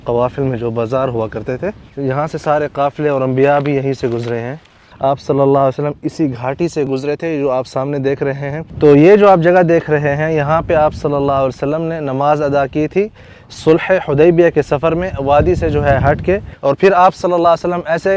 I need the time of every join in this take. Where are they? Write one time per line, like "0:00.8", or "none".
0:01.9
0:04.8
0:06.9
0:08.6
0:16.5